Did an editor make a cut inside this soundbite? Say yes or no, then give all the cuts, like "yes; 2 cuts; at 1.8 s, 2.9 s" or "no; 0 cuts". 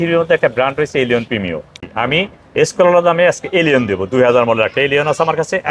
yes; 1 cut; at 1.8 s